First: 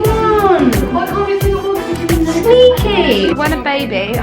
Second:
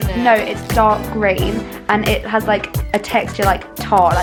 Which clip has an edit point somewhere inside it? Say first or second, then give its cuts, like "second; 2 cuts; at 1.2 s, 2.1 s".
first; 1 cut; at 3.3 s